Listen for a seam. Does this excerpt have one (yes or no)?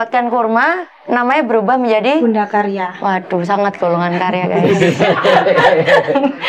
no